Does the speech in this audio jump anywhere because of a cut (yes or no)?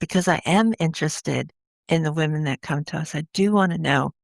no